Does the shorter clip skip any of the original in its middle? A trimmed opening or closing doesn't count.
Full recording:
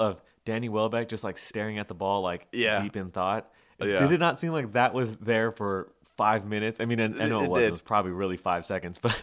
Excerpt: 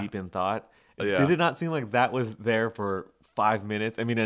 no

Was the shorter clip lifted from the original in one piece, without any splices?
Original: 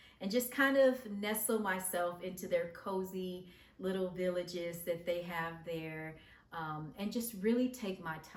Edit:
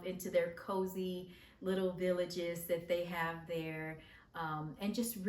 yes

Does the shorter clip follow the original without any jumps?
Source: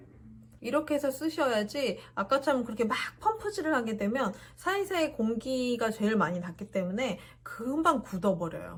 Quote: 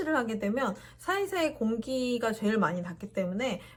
yes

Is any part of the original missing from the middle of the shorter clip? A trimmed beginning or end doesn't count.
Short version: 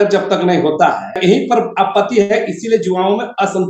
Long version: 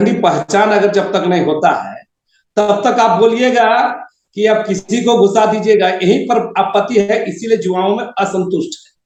yes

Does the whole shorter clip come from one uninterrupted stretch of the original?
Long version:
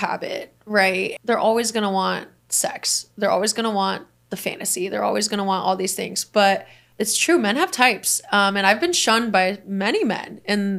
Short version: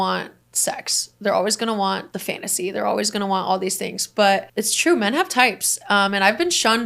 no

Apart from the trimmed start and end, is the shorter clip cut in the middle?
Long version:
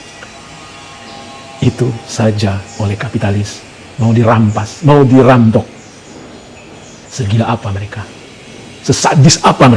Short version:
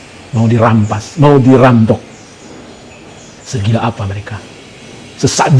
no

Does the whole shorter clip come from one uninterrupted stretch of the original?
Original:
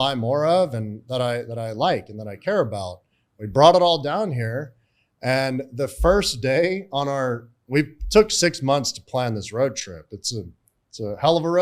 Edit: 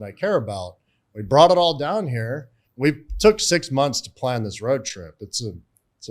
no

